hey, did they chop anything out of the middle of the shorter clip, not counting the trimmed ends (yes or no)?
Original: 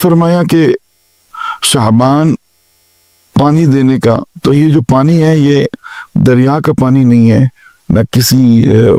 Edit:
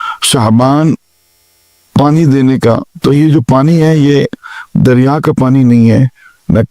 no